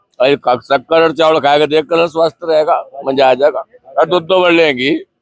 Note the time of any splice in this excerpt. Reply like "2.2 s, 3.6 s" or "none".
none